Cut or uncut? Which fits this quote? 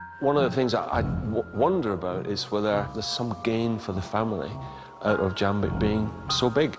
cut